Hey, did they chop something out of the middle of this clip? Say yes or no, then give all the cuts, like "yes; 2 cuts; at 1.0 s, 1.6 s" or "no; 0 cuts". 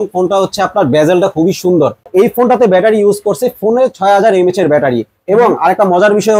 yes; 1 cut; at 2.0 s